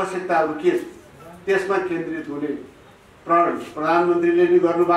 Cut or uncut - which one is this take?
uncut